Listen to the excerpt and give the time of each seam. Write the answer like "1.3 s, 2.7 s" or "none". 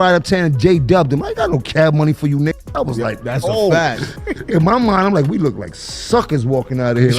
4.1 s